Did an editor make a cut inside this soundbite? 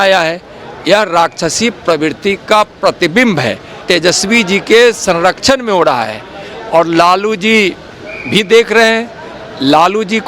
yes; 1 cut; at 3.8 s

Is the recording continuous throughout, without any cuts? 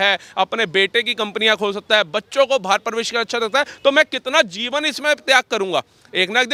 yes; 0 cuts

